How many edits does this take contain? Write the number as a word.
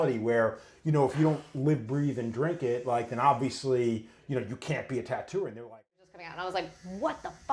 one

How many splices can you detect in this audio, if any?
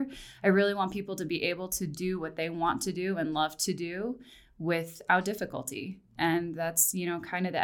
zero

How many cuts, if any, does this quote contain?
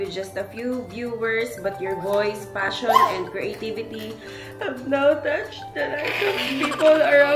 zero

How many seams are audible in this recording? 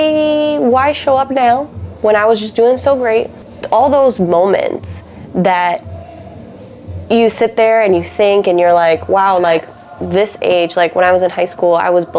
zero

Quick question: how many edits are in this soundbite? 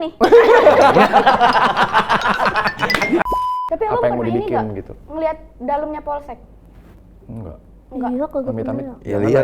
one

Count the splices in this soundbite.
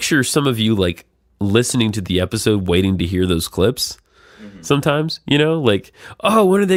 zero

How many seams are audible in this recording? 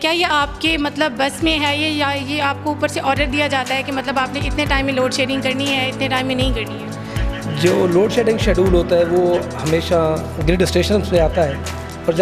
zero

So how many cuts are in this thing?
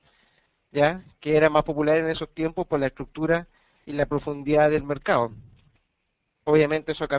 zero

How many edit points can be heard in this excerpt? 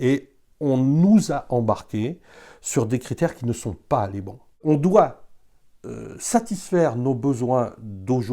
one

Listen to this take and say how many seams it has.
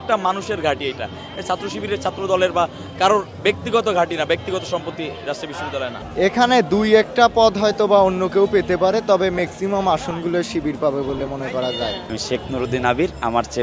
two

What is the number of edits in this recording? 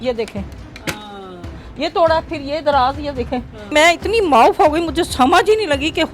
one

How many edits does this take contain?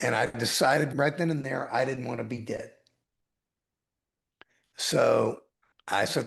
one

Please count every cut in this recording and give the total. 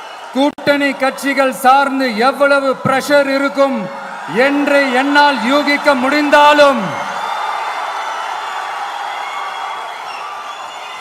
zero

